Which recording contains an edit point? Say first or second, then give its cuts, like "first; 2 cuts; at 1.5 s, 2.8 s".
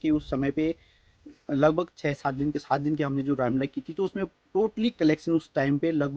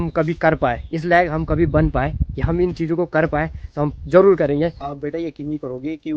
second; 1 cut; at 4.8 s